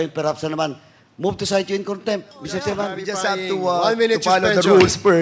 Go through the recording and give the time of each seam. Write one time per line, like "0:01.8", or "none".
0:03.0